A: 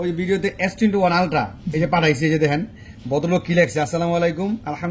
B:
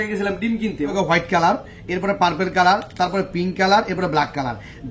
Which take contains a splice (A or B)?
B